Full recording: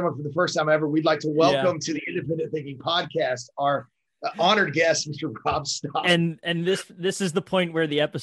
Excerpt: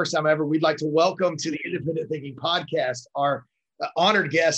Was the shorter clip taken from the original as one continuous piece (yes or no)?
yes